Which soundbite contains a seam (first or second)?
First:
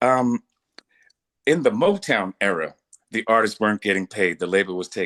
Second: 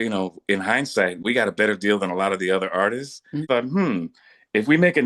second